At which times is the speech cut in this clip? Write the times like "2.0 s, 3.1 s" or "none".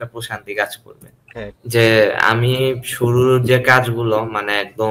1.5 s

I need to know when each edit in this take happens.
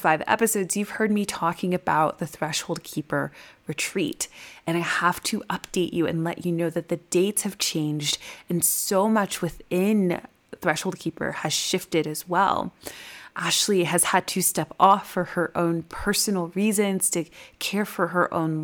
13.2 s

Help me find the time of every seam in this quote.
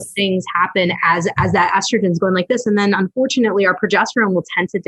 none

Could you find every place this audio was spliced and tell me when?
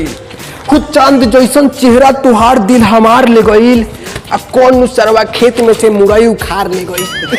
none

